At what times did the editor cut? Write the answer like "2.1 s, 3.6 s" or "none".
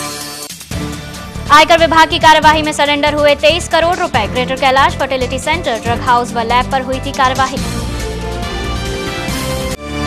none